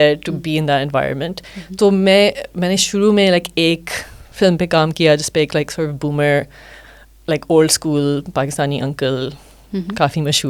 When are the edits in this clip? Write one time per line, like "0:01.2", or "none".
none